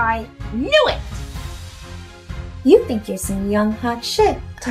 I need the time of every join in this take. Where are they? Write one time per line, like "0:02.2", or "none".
0:01.0
0:02.6

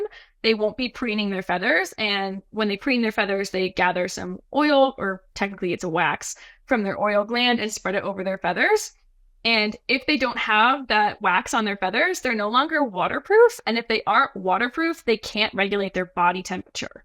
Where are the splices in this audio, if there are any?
none

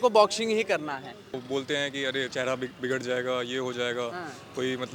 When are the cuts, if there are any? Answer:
0:01.4

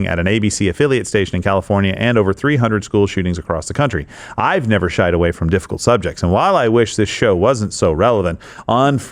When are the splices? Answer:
none

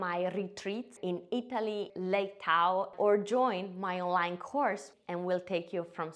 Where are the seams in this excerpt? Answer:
0:01.9
0:02.9
0:04.9

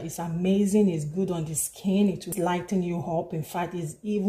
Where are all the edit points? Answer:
0:02.3

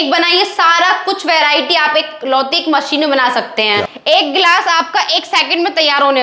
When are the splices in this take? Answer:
0:03.9

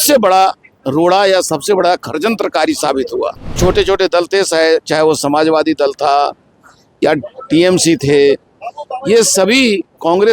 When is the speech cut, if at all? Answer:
0:03.6

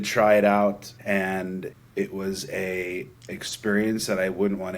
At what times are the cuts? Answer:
0:01.7

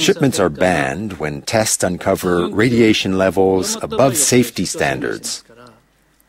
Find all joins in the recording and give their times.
0:05.2

